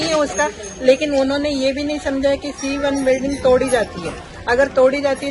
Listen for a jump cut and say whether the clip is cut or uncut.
uncut